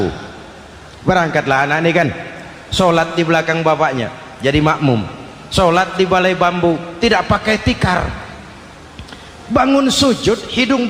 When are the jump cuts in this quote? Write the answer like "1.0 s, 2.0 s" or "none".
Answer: none